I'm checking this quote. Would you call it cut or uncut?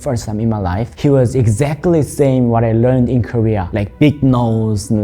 cut